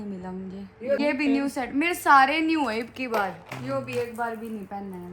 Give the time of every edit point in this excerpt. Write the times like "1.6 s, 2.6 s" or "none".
1.0 s, 3.5 s